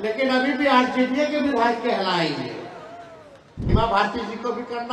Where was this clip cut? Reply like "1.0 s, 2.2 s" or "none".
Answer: 3.7 s